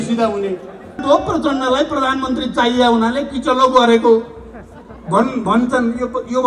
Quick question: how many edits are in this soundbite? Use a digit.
1